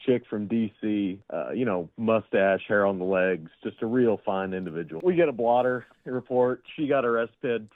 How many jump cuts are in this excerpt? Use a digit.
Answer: 2